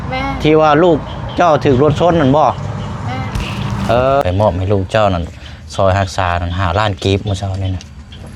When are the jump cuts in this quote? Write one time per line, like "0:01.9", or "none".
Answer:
0:04.2